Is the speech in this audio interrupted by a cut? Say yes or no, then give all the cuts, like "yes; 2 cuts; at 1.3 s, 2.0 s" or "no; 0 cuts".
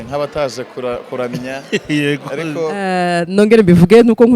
yes; 1 cut; at 2.8 s